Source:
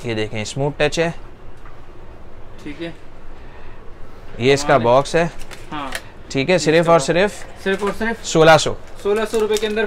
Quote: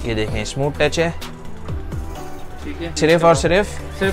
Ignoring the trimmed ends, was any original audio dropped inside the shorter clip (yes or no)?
yes